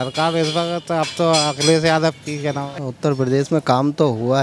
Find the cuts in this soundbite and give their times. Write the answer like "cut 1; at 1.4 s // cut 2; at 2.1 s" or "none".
cut 1; at 2.7 s